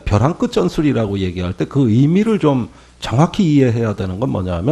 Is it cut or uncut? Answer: uncut